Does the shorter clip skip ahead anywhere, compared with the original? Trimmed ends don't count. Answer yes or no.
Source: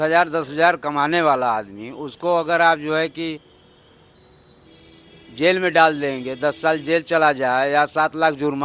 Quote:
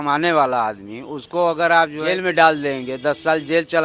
yes